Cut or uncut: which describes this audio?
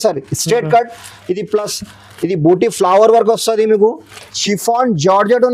cut